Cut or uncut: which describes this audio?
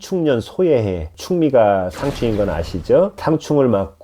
cut